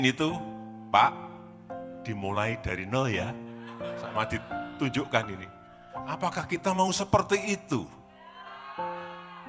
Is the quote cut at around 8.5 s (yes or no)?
yes